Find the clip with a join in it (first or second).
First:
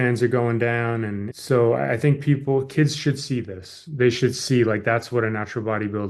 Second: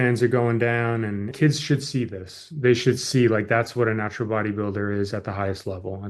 second